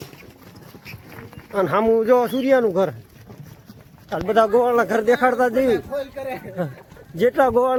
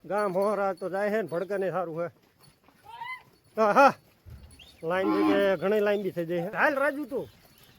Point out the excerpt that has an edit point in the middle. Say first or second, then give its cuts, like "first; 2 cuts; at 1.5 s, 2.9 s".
second; 1 cut; at 6.5 s